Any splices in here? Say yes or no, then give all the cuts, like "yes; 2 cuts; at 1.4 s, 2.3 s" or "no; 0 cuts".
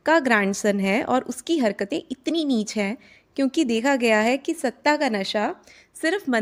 no; 0 cuts